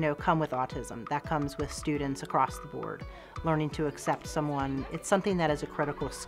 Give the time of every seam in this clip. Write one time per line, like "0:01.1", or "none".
0:04.9